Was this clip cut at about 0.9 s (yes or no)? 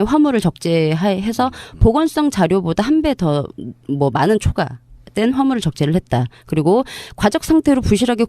yes